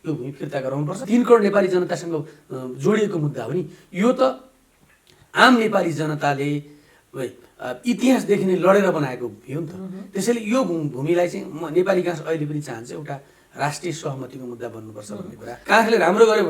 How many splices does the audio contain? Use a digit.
2